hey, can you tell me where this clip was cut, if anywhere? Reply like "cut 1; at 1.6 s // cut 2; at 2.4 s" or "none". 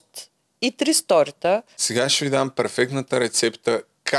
cut 1; at 1.8 s